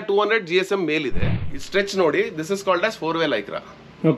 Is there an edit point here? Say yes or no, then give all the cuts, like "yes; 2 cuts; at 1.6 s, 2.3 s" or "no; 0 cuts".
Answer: yes; 1 cut; at 1.2 s